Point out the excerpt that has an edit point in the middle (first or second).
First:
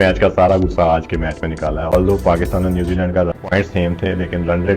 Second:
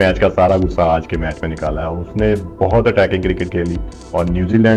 first